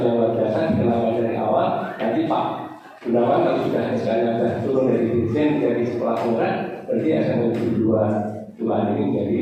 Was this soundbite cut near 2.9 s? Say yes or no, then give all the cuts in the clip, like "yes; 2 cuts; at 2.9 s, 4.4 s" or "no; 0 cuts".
no; 0 cuts